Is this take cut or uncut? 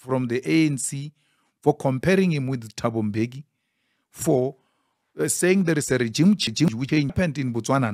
uncut